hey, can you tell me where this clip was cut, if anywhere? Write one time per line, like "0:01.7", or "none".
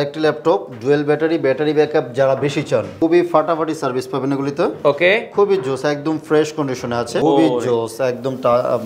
0:02.9
0:07.2